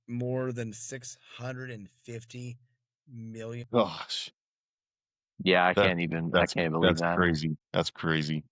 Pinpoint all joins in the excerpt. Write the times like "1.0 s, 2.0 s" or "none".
3.7 s, 7.6 s